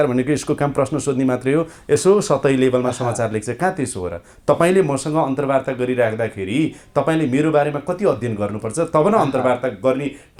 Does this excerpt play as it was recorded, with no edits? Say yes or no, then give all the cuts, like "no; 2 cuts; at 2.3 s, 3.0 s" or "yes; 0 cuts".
yes; 0 cuts